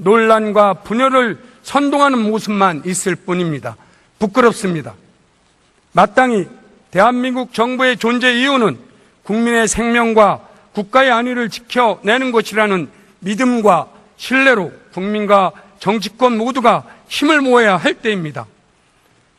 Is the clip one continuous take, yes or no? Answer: no